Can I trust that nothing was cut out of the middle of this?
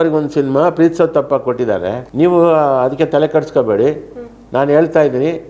no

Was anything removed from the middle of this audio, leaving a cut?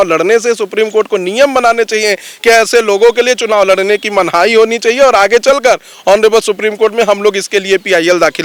no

